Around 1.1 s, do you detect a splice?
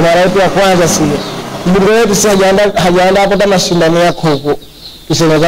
yes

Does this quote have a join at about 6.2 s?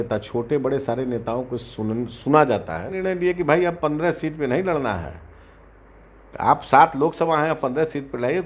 no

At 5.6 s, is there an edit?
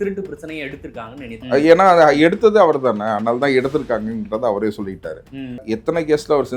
yes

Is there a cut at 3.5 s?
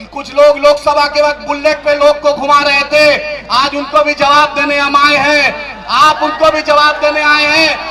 no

